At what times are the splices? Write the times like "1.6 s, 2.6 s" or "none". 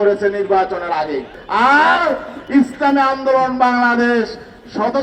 1.4 s